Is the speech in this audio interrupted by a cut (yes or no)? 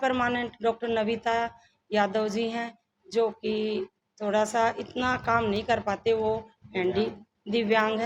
no